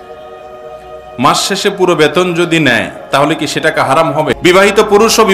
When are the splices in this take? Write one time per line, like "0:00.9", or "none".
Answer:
0:04.4